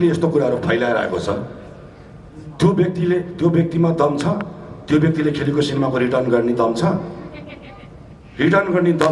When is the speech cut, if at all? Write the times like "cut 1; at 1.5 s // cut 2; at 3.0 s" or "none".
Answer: none